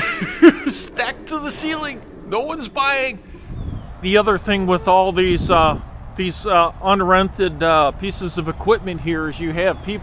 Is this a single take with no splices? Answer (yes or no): no